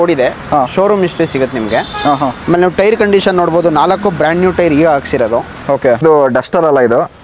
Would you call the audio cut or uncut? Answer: cut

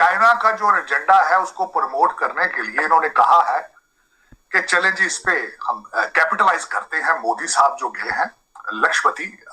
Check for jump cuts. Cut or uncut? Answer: uncut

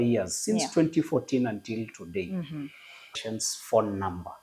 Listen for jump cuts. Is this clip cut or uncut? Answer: cut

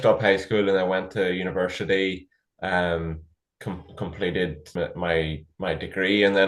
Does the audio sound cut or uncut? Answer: cut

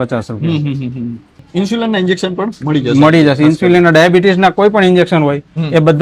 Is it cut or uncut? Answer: cut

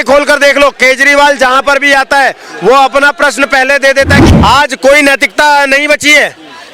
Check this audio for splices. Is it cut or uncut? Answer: cut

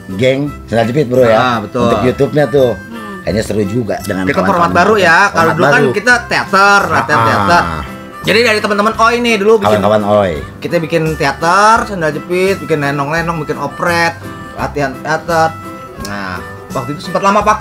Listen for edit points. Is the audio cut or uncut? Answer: uncut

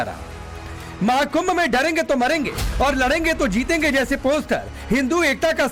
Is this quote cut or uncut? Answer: uncut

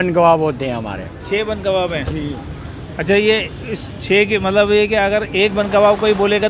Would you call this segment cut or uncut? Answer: uncut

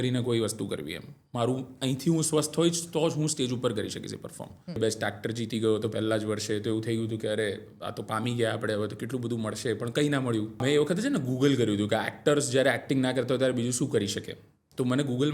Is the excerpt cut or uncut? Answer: cut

